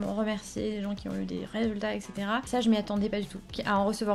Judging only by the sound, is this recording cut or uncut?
cut